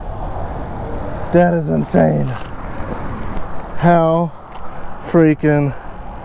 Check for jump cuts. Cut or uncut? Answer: uncut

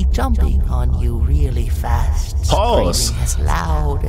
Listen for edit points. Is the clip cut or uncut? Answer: uncut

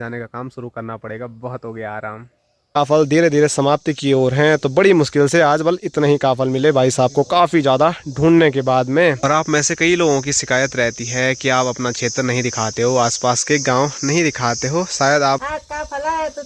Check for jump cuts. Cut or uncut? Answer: cut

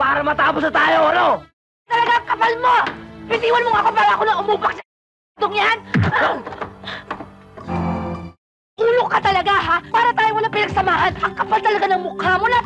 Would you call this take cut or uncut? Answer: cut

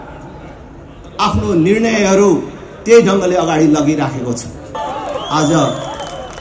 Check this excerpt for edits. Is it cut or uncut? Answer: cut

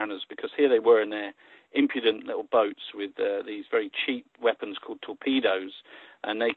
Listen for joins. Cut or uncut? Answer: uncut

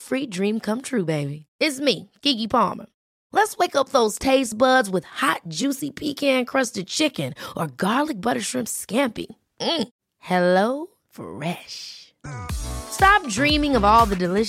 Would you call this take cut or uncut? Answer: uncut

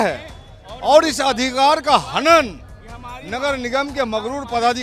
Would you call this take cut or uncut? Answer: uncut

